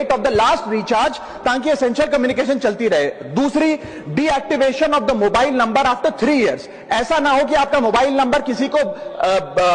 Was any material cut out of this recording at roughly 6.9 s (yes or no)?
no